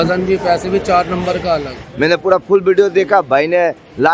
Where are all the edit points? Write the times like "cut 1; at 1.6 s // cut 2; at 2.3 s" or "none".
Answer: cut 1; at 1.8 s